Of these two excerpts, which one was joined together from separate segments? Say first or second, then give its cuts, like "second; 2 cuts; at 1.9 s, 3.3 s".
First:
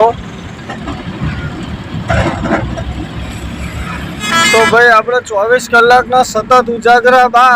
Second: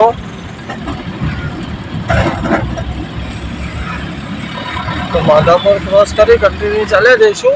first; 1 cut; at 4.2 s